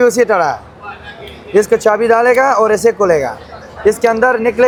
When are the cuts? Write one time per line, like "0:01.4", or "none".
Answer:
none